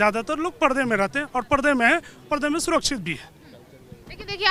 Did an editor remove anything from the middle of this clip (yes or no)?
no